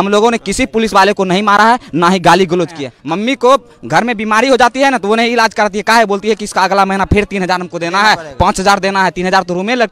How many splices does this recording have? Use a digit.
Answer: 1